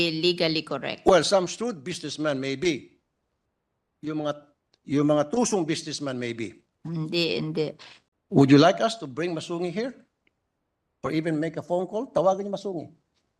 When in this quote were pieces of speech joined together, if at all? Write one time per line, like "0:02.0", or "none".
0:07.9